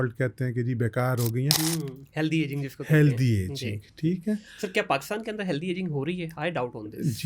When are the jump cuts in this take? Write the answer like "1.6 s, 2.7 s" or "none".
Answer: 1.6 s